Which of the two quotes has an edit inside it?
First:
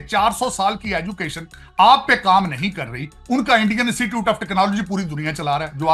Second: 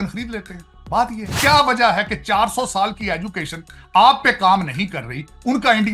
second; 1 cut; at 1.2 s

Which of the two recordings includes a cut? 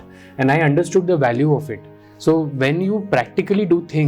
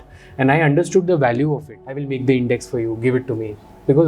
second; 1 cut; at 2.1 s

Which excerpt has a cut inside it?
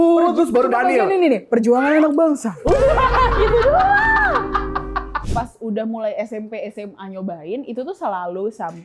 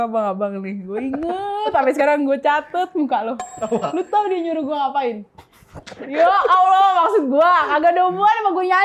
first; 1 cut; at 5.2 s

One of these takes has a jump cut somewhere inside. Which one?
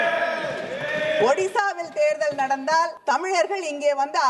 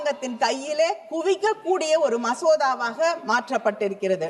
first; 1 cut; at 3.0 s

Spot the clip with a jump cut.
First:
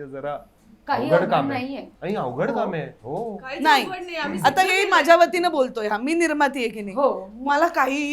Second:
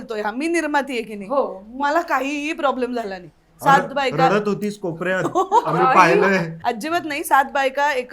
second; 1 cut; at 6.5 s

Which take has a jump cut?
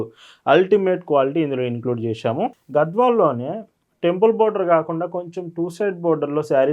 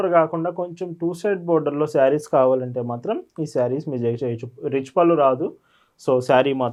first; 1 cut; at 2.6 s

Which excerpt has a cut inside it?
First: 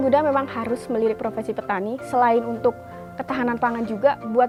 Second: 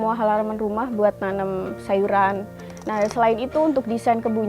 second; 1 cut; at 2.5 s

